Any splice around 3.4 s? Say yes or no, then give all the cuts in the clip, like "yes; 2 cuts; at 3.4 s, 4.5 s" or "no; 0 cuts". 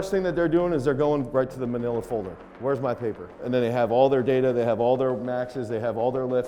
yes; 1 cut; at 3.4 s